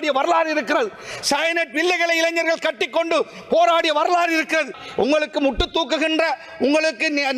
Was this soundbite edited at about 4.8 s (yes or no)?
yes